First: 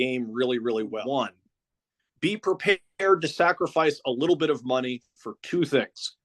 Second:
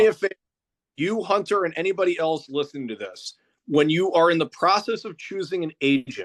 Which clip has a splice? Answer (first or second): first